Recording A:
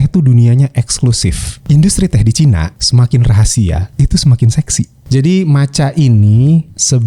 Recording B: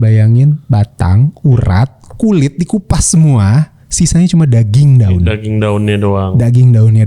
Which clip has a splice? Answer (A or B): A